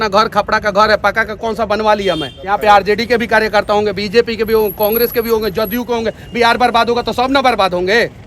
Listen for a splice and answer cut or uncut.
cut